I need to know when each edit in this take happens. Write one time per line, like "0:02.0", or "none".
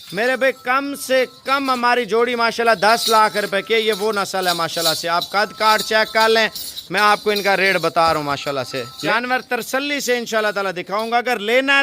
0:09.0